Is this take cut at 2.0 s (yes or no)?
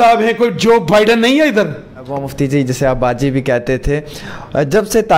yes